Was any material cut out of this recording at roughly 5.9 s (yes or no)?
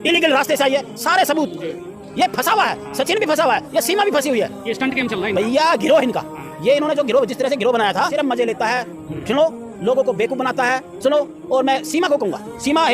no